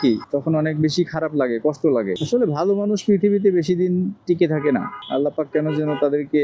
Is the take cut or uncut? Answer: uncut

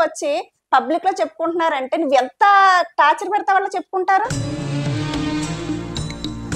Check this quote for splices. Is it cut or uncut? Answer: uncut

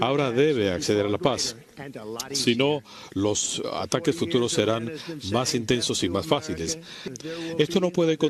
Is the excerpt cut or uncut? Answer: uncut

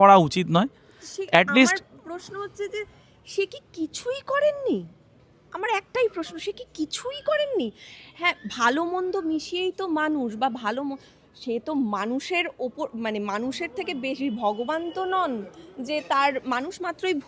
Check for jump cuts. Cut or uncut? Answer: uncut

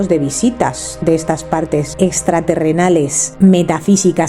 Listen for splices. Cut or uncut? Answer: cut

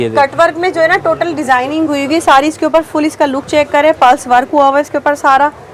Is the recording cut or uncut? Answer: uncut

